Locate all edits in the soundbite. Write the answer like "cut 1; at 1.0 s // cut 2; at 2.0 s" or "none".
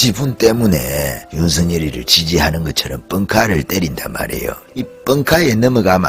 cut 1; at 1.2 s // cut 2; at 4.6 s